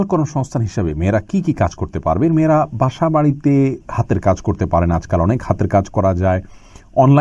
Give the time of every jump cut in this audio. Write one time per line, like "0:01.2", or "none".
none

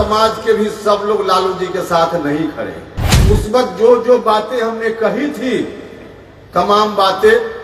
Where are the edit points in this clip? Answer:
0:03.1

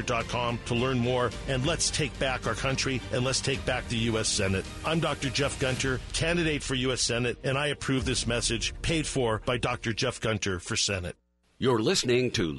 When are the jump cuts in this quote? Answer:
0:11.2

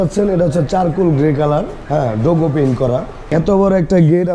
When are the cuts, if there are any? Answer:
0:01.8
0:03.3

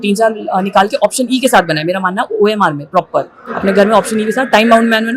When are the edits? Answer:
none

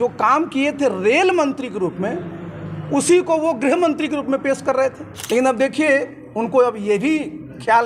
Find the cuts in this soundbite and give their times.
0:05.1

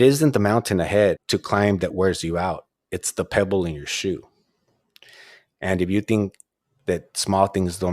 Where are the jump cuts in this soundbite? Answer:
0:01.2

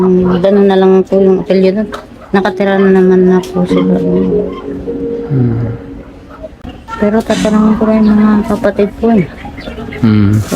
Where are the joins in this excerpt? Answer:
0:06.5

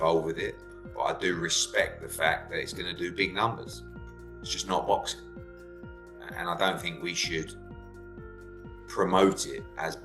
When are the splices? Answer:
0:07.5
0:08.9

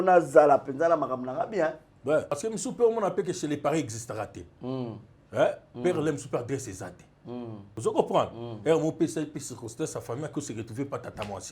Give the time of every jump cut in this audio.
0:02.3
0:07.6

